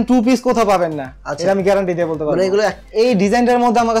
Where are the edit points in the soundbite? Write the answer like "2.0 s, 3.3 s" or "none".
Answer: 2.8 s

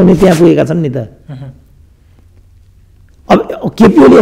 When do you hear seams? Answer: none

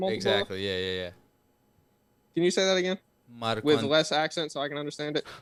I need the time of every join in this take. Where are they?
none

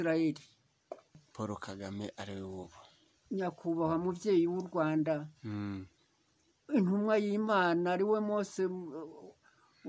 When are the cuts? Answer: 1.3 s

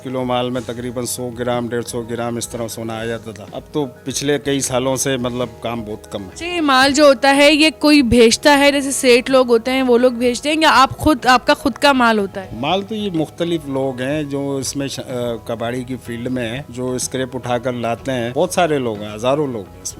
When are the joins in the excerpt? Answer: none

